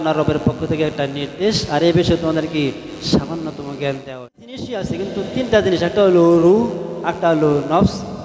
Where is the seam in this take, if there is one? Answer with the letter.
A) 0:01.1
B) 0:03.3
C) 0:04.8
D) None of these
C